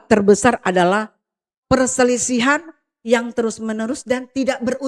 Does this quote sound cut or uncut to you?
uncut